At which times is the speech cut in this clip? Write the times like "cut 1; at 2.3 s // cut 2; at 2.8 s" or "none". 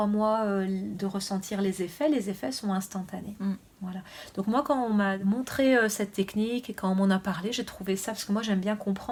none